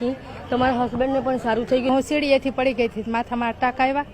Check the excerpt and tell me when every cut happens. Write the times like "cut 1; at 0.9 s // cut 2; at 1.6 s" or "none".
cut 1; at 1.9 s

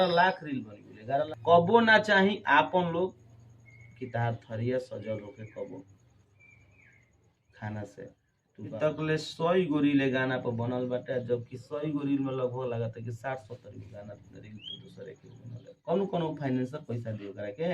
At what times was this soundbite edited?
cut 1; at 1.3 s // cut 2; at 8.8 s // cut 3; at 15.7 s

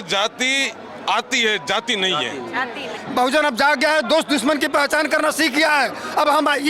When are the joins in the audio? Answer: cut 1; at 3.0 s

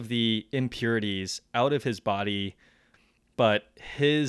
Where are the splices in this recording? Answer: cut 1; at 2.9 s

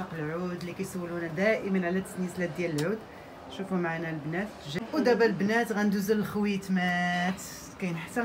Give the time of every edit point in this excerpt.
cut 1; at 4.6 s

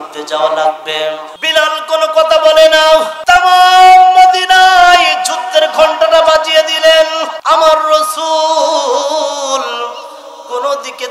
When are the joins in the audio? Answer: cut 1; at 1.3 s // cut 2; at 3.1 s // cut 3; at 7.3 s

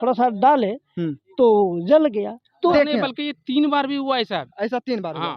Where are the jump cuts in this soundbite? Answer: cut 1; at 2.7 s

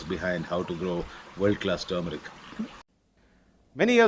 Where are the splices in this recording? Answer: cut 1; at 2.8 s

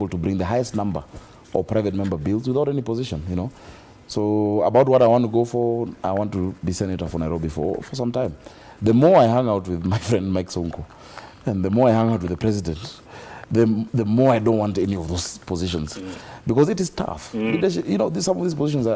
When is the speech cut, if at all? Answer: cut 1; at 6.4 s

